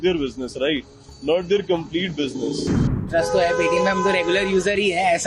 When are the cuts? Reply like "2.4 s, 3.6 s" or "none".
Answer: 3.1 s